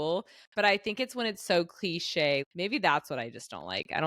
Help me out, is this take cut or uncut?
cut